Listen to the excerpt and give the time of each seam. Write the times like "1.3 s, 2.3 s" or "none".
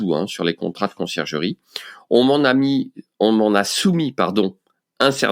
none

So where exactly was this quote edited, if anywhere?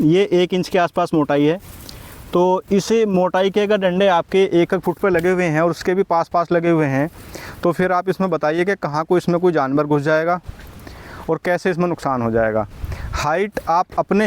none

